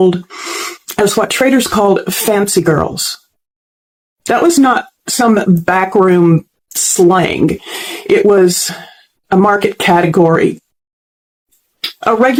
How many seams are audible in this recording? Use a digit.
0